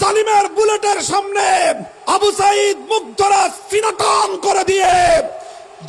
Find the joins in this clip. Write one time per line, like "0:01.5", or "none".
0:01.9